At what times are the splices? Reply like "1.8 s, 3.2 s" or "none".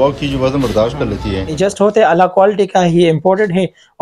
1.6 s